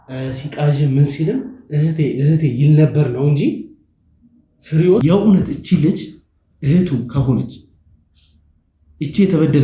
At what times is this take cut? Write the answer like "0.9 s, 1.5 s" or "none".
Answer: 5.0 s